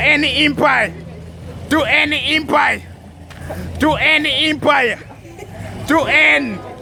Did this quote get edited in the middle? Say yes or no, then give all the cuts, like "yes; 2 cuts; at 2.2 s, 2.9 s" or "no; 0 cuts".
no; 0 cuts